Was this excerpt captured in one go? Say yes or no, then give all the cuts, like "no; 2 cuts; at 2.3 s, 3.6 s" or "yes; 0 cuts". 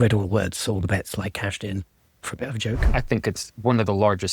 no; 1 cut; at 2.9 s